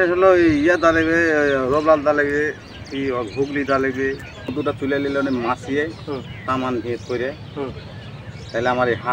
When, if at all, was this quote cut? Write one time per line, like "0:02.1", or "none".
0:04.5